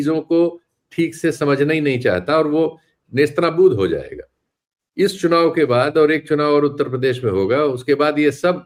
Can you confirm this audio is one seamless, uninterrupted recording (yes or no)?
yes